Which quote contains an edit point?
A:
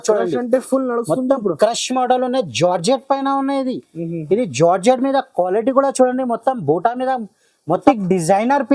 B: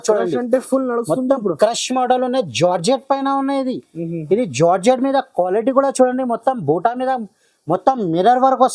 A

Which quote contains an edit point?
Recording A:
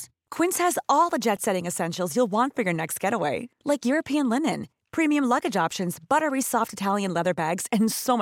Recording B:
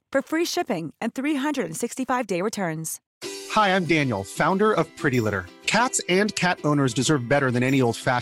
B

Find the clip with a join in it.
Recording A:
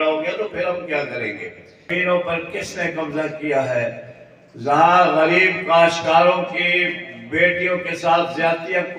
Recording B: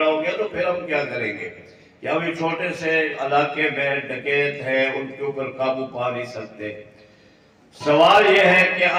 A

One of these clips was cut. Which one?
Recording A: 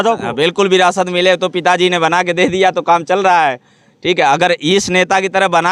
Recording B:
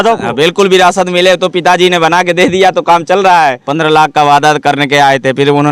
B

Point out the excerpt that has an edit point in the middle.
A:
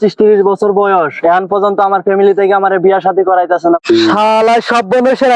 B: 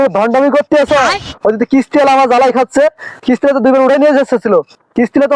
A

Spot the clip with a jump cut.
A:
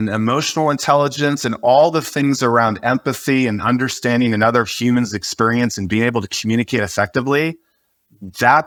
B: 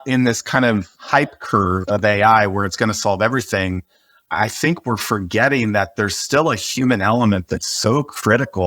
B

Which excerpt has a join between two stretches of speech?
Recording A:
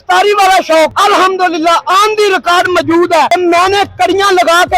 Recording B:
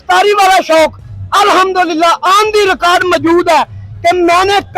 A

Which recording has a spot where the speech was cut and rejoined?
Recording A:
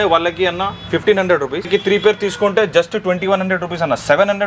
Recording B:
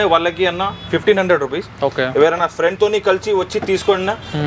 A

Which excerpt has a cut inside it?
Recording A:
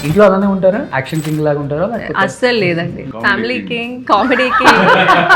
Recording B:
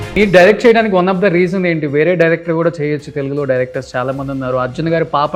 A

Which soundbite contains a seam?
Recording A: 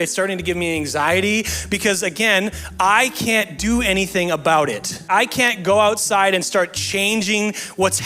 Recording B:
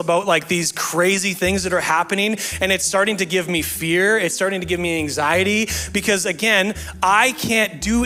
A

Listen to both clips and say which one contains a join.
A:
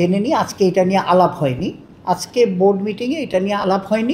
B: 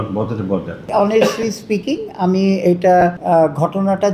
B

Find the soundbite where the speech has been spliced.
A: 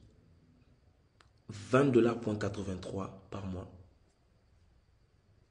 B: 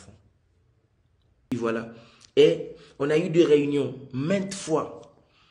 B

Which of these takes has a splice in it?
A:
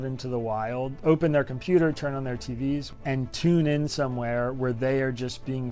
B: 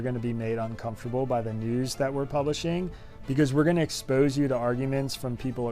A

